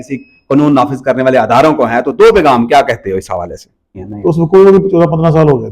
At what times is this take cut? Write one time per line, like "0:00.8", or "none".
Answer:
0:04.0